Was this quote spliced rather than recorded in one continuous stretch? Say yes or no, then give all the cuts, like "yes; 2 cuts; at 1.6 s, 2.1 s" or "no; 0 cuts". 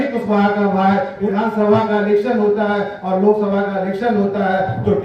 yes; 1 cut; at 1.2 s